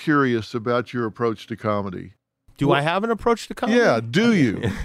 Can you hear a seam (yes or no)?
no